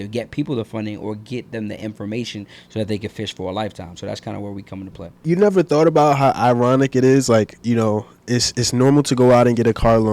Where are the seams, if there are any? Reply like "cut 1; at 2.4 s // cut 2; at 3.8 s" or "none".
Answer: cut 1; at 5.2 s